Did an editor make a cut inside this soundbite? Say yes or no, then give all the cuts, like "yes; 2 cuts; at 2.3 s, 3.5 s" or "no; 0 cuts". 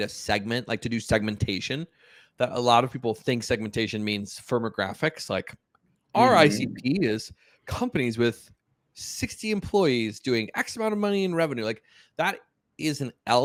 no; 0 cuts